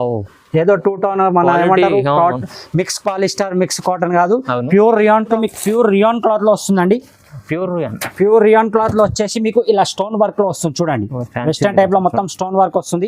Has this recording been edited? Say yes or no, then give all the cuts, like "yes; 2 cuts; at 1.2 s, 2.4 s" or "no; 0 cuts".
yes; 1 cut; at 5.4 s